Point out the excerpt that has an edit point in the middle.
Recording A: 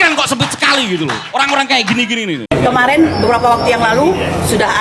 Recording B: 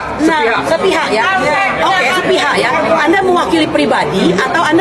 A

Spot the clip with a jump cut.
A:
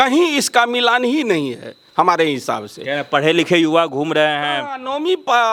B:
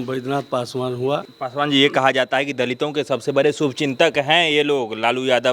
B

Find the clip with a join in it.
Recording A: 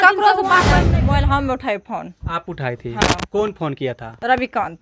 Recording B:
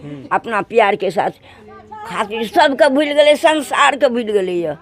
A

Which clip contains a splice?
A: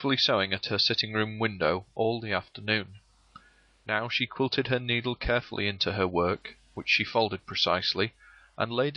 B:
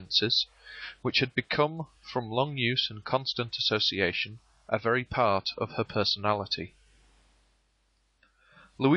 A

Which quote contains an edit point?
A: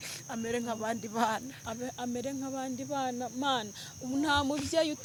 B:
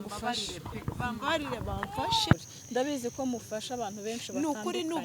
B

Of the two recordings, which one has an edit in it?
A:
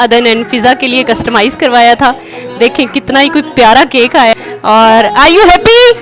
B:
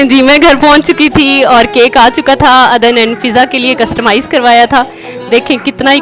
A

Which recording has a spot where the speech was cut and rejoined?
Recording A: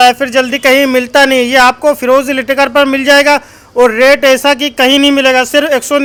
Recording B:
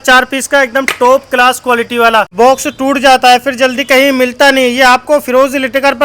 B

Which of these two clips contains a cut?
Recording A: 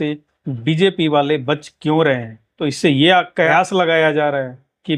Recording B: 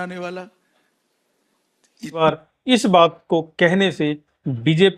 B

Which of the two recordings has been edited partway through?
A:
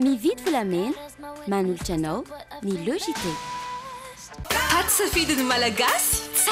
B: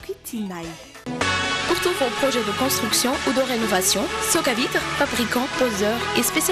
A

